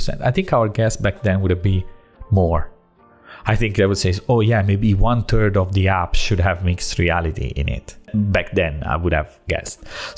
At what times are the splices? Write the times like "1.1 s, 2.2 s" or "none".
8.1 s